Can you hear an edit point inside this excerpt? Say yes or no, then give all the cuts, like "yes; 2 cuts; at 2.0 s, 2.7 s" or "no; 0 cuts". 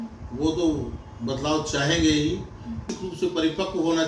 yes; 1 cut; at 2.9 s